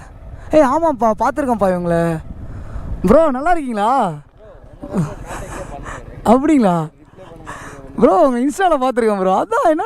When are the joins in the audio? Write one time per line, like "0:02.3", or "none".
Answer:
none